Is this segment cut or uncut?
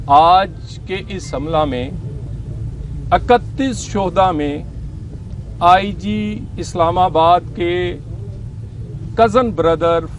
uncut